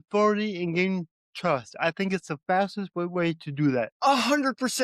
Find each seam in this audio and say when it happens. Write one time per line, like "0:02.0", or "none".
0:03.9